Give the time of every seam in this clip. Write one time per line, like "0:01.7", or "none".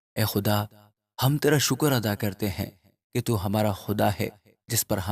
none